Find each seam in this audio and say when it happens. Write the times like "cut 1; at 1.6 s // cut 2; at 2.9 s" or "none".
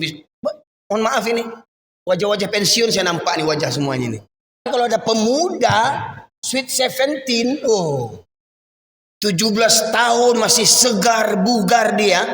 cut 1; at 4.6 s